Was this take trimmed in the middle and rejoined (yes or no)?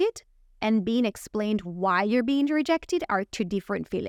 no